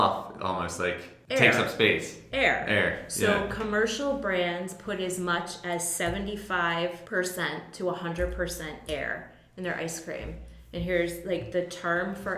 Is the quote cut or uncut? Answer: cut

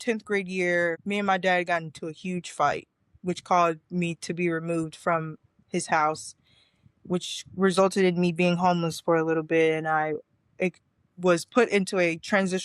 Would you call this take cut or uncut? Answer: cut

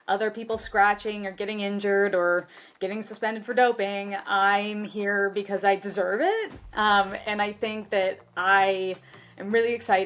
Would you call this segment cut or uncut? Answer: uncut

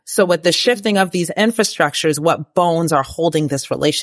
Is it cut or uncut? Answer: uncut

